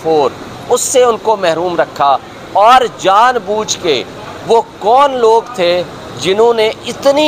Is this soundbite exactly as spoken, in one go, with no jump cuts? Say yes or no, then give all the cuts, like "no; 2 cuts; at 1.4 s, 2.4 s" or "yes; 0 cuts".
yes; 0 cuts